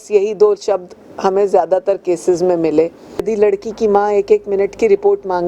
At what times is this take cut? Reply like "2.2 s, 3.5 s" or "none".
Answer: 3.2 s